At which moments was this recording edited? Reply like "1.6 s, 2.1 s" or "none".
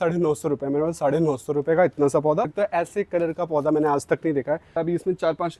2.5 s, 4.8 s